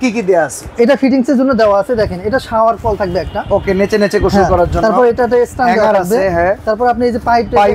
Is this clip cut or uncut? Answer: uncut